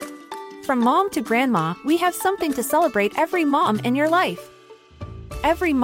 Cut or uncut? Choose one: uncut